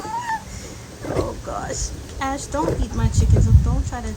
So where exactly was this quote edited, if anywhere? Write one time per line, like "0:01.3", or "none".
none